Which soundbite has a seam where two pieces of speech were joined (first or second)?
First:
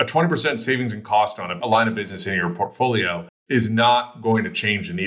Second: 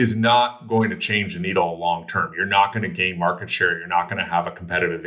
first